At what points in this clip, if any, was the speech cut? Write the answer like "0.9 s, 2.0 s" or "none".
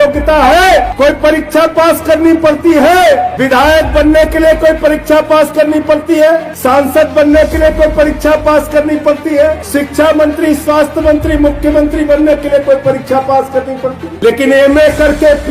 0.9 s, 3.3 s, 6.5 s, 9.6 s, 14.1 s